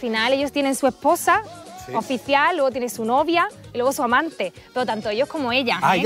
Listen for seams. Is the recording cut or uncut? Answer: uncut